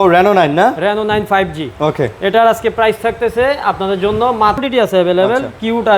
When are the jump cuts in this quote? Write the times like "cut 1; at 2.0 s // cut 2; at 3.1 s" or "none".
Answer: cut 1; at 4.6 s